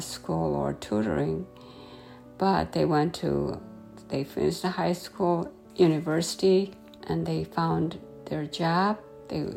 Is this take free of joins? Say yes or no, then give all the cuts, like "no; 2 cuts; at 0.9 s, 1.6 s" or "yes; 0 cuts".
yes; 0 cuts